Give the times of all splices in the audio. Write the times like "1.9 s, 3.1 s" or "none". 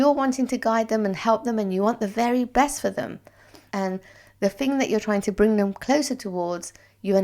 3.6 s